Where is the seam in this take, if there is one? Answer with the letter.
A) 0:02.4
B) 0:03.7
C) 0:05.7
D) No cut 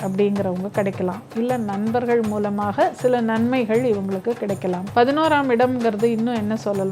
D